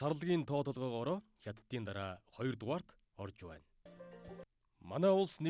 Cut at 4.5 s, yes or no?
yes